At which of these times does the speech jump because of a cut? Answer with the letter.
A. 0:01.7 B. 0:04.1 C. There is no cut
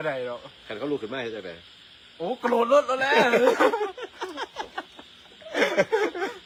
C